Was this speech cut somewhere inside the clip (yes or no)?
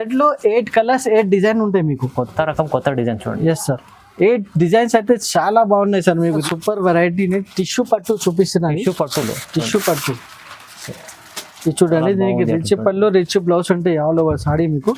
yes